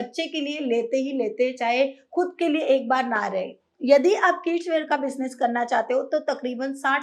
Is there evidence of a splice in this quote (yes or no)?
yes